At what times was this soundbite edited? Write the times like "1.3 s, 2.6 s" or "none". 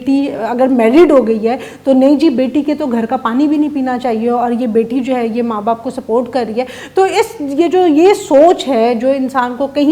none